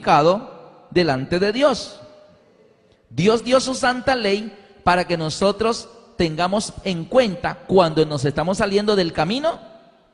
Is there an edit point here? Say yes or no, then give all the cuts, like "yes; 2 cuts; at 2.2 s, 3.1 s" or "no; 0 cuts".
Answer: no; 0 cuts